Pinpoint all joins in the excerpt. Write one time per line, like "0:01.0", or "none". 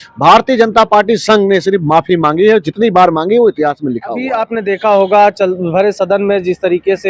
0:04.1